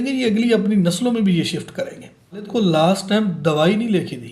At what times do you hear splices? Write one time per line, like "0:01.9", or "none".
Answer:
0:02.5